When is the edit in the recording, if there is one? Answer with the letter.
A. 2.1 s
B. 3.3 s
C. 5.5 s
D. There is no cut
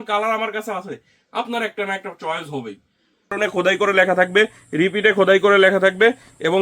B